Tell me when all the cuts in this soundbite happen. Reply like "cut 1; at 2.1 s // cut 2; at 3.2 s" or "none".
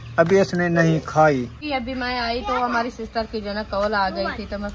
cut 1; at 1.6 s